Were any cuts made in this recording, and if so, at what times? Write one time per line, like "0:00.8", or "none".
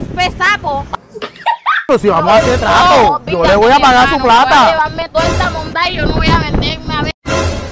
0:01.9